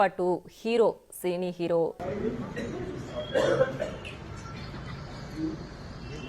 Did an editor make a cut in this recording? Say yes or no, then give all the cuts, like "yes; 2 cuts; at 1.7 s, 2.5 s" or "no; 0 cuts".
yes; 1 cut; at 2.0 s